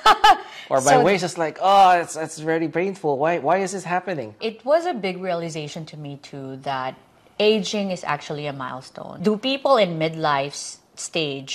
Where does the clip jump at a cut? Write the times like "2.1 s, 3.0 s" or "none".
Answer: 4.3 s, 9.2 s